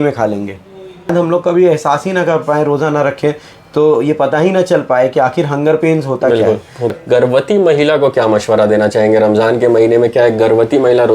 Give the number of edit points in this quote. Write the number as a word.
two